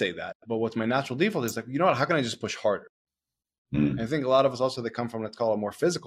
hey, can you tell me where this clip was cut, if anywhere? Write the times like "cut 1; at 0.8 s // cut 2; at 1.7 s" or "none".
none